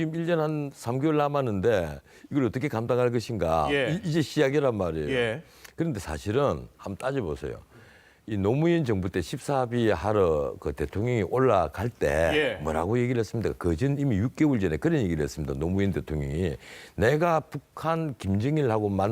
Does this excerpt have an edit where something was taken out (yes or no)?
yes